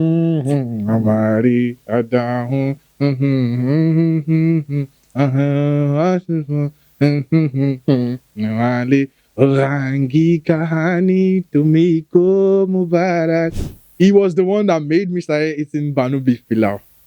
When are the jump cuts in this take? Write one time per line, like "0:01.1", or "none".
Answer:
0:13.7

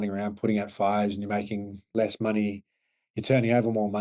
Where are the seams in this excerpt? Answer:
none

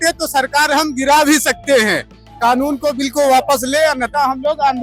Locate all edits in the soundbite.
none

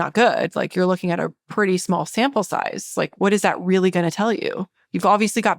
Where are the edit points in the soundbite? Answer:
0:03.1

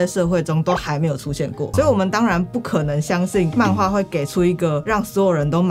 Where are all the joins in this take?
0:01.7

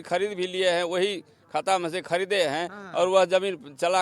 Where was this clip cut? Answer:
none

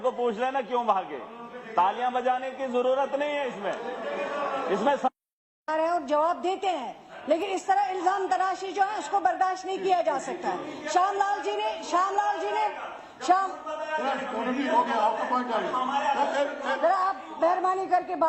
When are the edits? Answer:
none

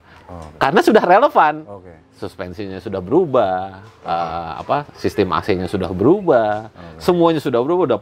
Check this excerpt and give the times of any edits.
none

